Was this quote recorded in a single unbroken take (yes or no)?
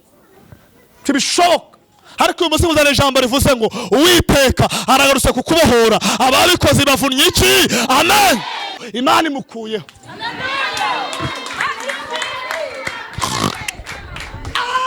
no